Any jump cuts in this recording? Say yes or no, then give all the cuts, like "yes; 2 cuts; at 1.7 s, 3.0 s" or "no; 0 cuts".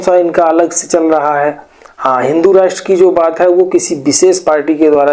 no; 0 cuts